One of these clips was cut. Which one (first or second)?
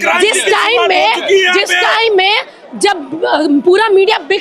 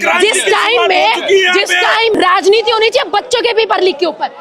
second